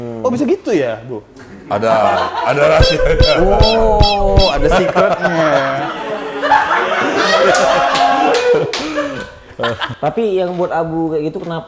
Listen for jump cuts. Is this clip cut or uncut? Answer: cut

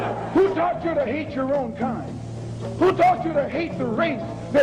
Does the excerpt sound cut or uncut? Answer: uncut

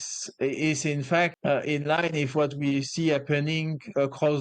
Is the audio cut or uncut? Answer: cut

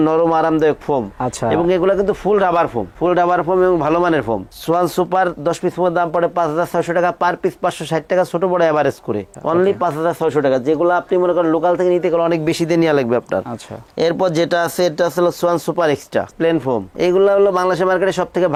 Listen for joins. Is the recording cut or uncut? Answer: uncut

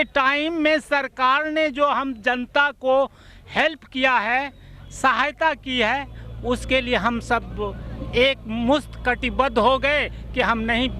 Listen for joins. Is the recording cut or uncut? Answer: uncut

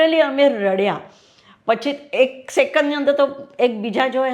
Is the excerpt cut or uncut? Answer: uncut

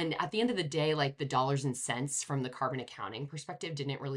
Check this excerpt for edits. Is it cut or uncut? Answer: uncut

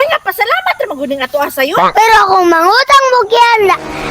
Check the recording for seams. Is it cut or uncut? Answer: cut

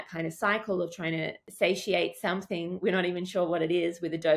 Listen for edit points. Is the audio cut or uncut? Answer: cut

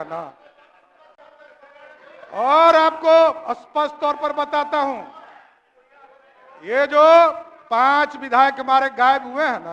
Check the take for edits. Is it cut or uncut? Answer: uncut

